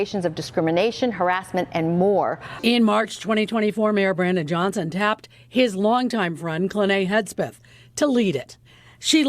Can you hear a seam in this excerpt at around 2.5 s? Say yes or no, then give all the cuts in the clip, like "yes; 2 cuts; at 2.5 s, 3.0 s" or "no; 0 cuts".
yes; 1 cut; at 2.5 s